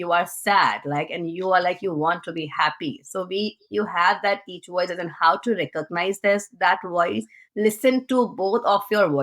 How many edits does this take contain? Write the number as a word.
one